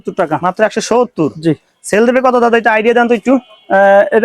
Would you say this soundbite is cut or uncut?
uncut